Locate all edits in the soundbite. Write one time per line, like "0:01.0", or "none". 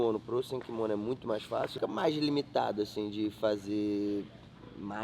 0:01.7

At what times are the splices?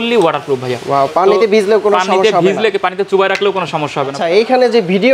0:04.2

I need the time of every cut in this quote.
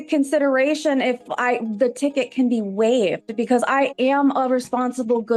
none

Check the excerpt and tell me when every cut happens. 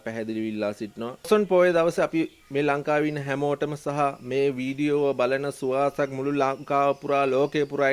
0:01.3

